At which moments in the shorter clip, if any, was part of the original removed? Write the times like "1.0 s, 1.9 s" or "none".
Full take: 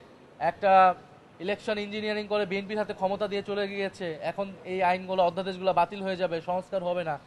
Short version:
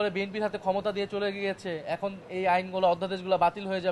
none

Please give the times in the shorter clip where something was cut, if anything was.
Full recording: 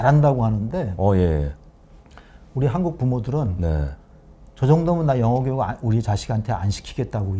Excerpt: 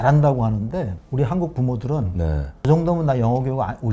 0.9 s, 2.5 s

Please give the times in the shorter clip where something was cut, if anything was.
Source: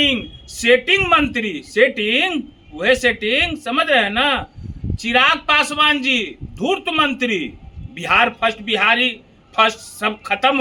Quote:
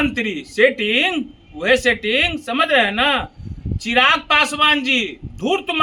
none

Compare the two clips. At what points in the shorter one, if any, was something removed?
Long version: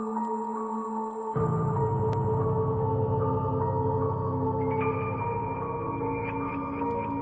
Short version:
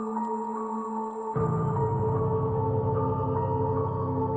2.0 s

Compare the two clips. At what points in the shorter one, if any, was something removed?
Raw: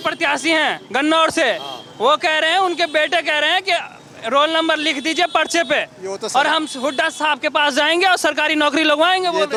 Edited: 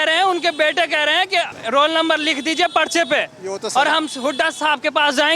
1.6 s

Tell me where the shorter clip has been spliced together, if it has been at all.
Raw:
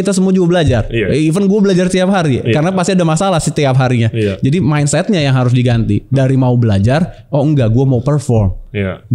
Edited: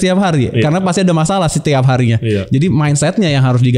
none

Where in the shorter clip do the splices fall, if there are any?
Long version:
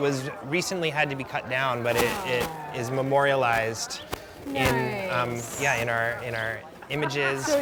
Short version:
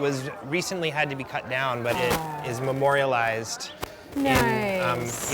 1.9 s

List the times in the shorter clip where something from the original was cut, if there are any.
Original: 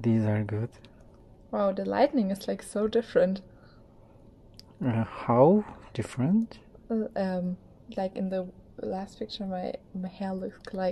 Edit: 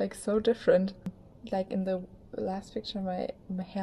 1.3 s

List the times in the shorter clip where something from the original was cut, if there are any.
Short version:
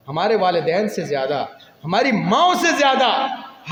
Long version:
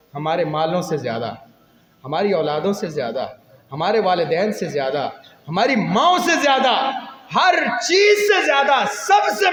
none

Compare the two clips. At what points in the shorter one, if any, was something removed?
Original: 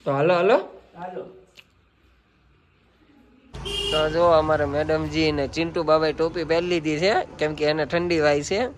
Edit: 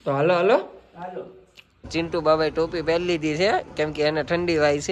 1.9 s

